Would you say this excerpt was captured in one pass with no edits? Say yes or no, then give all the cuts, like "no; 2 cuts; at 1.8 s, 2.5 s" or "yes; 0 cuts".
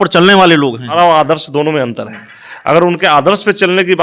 no; 1 cut; at 0.9 s